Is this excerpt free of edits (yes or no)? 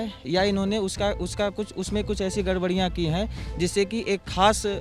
yes